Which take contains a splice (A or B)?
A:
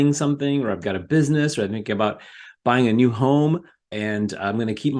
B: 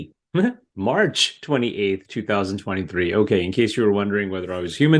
A